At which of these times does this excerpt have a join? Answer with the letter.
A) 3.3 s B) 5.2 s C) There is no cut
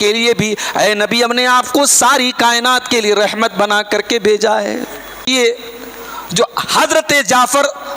B